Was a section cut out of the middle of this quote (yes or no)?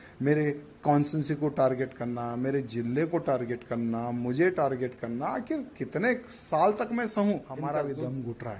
yes